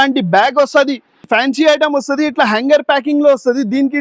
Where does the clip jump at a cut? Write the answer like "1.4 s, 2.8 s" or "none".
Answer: 1.3 s